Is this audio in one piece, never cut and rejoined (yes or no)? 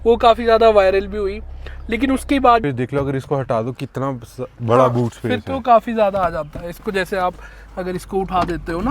no